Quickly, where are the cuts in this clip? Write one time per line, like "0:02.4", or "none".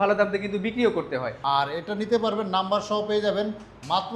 0:01.3